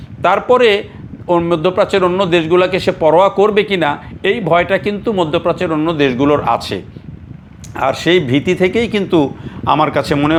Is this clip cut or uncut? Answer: uncut